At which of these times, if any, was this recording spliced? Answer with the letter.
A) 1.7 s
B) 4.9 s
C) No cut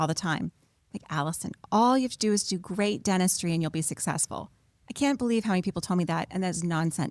C